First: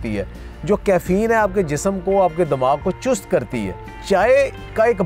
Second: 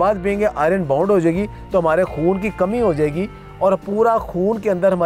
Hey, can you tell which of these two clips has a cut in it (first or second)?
first